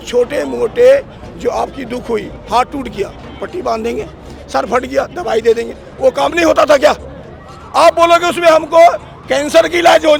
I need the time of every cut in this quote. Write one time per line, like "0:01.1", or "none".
none